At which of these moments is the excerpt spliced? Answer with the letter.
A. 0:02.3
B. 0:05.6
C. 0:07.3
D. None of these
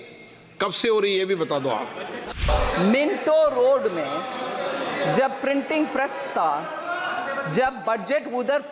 A